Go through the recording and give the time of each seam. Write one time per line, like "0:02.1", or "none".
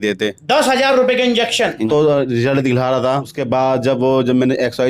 0:01.8
0:03.3